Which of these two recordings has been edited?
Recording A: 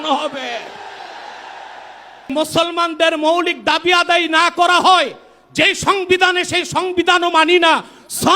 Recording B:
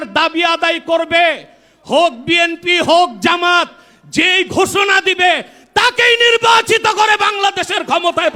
A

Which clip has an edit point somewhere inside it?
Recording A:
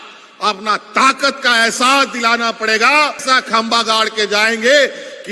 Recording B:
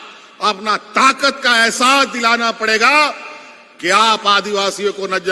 A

